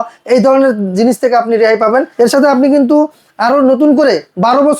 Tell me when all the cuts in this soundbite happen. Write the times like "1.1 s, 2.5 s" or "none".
2.1 s